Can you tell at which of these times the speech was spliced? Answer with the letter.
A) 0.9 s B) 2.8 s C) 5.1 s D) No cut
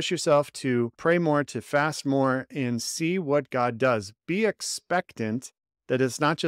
A